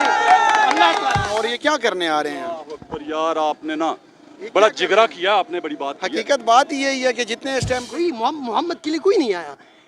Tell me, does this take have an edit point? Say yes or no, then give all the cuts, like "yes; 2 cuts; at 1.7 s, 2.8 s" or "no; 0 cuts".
yes; 2 cuts; at 1.3 s, 7.9 s